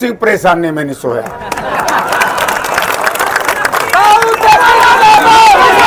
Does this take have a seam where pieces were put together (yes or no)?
no